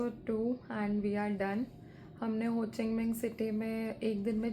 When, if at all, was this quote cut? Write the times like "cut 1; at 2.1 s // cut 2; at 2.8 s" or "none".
none